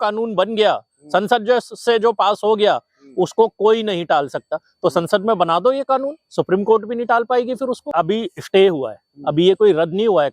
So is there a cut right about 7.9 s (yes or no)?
yes